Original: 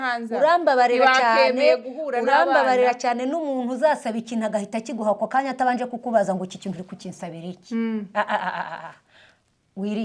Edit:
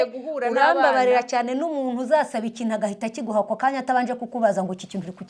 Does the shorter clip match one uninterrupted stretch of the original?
yes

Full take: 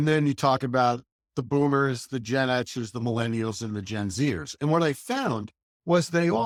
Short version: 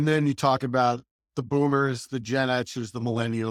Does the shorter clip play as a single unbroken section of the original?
yes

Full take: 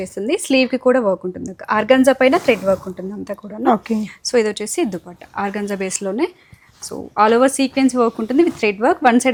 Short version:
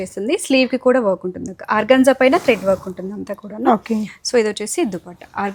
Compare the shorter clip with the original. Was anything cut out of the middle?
no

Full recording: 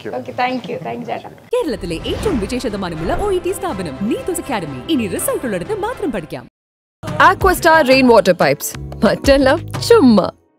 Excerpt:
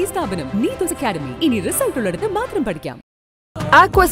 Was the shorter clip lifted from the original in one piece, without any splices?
yes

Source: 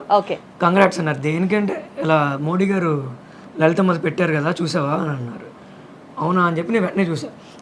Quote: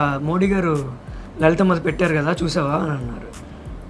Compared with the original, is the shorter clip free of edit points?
yes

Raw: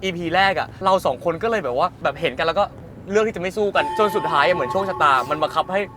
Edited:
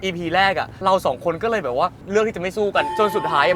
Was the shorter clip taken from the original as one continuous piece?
no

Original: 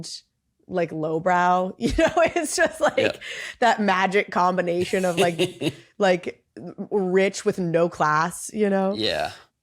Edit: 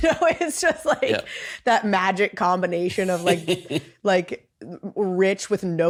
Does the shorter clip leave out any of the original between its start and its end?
no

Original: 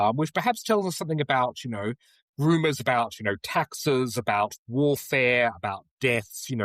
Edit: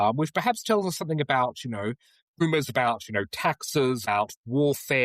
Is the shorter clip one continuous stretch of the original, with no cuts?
no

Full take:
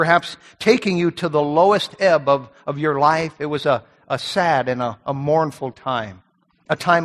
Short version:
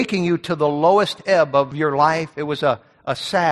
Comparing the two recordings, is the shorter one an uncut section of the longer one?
no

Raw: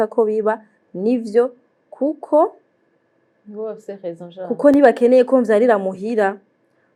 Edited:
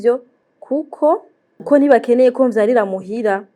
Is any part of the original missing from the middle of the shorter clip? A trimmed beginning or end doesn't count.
yes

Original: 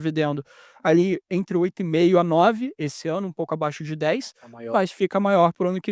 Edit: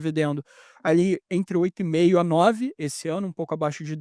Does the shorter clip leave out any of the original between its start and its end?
no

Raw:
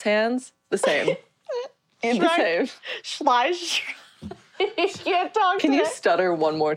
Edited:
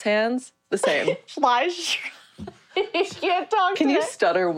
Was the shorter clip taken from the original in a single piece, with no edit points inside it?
no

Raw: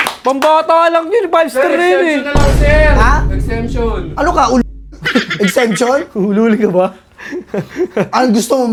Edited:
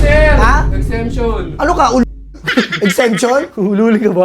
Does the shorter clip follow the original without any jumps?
yes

